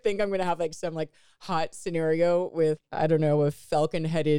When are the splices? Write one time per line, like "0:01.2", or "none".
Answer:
0:02.9